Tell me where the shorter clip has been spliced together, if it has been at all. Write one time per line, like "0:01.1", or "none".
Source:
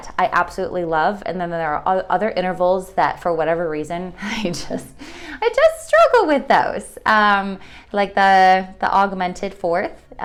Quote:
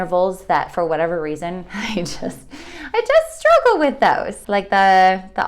0:04.3